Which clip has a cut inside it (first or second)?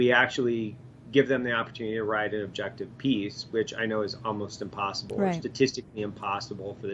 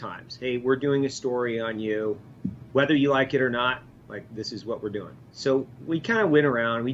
second